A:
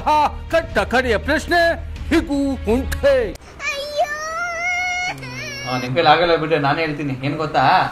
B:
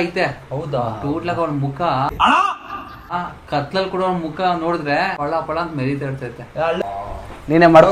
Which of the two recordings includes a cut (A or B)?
B